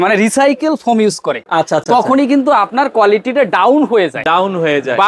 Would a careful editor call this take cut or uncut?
uncut